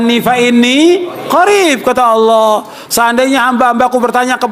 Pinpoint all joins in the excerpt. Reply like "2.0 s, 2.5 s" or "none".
1.2 s